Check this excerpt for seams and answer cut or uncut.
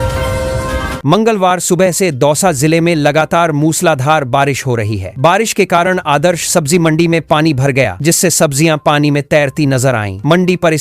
cut